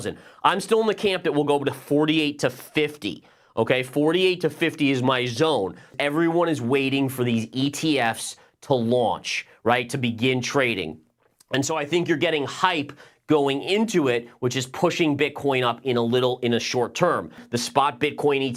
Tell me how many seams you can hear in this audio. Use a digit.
2